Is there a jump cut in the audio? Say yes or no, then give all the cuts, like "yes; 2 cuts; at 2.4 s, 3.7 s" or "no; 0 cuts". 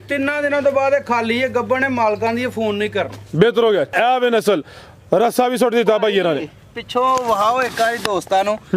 yes; 1 cut; at 3.9 s